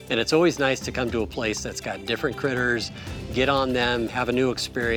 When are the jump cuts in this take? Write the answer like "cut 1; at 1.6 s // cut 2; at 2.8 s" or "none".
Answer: none